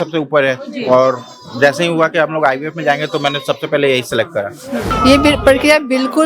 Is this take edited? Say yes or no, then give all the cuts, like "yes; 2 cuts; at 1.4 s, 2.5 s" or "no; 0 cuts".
yes; 1 cut; at 4.9 s